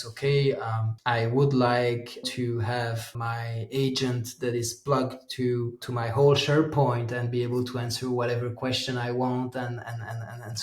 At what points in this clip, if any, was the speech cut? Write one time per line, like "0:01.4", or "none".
0:00.9
0:02.3
0:03.1
0:05.8